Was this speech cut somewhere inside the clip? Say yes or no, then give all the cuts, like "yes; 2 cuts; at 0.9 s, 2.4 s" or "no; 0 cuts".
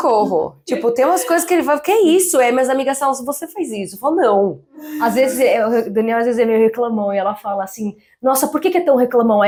no; 0 cuts